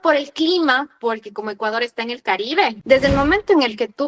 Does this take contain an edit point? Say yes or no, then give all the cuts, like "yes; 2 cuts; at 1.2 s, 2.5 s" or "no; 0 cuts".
yes; 1 cut; at 2.8 s